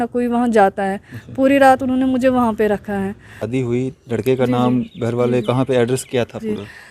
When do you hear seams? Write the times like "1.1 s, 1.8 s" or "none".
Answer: 3.3 s